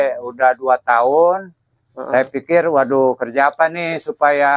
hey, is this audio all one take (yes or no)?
yes